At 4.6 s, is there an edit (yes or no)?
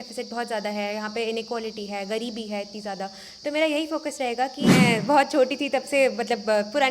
yes